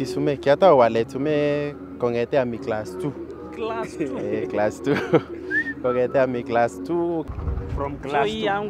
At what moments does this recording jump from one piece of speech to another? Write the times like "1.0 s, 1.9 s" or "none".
7.2 s